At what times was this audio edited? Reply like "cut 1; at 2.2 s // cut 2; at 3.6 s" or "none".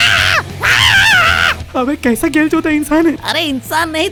none